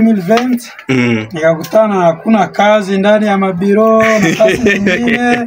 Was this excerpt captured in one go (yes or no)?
yes